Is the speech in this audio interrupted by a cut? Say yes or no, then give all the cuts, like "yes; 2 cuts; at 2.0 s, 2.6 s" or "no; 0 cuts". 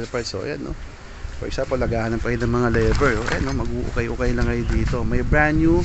no; 0 cuts